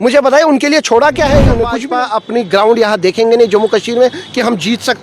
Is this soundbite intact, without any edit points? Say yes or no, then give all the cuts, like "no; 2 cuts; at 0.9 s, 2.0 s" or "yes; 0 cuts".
no; 1 cut; at 1.8 s